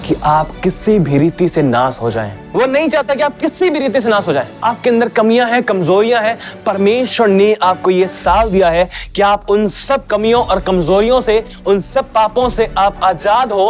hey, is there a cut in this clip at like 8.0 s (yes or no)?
no